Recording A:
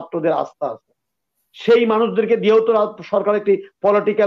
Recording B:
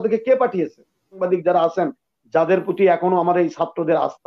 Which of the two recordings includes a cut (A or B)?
B